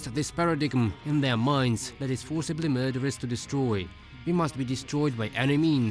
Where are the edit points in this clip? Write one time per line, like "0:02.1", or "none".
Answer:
0:01.0
0:01.9

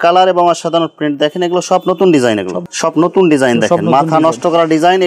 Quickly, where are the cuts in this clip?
0:02.6

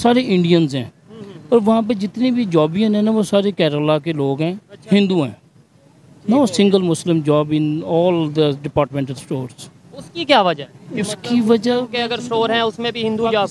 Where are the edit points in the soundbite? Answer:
none

